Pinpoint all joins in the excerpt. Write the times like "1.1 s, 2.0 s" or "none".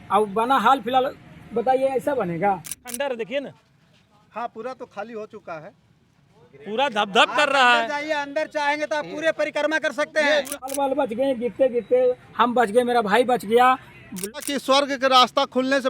2.9 s, 10.7 s, 14.3 s